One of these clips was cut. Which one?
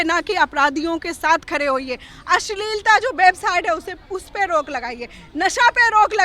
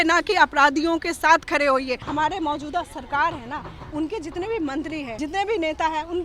second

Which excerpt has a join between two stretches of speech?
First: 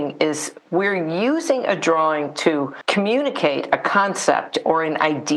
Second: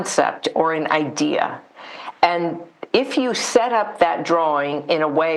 first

